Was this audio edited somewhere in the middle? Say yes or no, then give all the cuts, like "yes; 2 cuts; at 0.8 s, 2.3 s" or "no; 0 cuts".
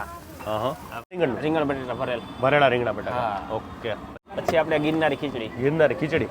yes; 2 cuts; at 1.2 s, 4.2 s